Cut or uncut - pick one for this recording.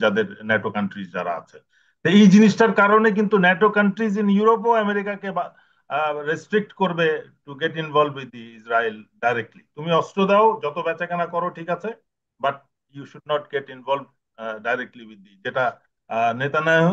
uncut